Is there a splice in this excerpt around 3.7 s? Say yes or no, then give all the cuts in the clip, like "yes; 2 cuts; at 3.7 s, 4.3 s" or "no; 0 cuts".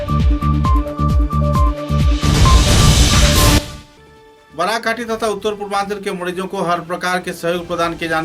yes; 1 cut; at 3.7 s